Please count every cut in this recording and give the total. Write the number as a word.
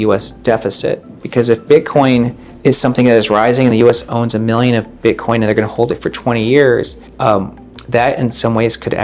two